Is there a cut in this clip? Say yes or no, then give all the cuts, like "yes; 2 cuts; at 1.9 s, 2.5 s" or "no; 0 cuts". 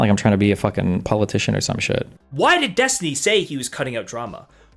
yes; 1 cut; at 2.2 s